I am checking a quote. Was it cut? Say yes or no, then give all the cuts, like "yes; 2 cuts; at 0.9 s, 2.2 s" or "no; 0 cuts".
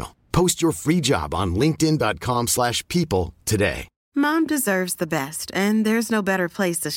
yes; 1 cut; at 3.9 s